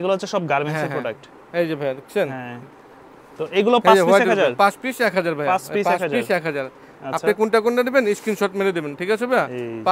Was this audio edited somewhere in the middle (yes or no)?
no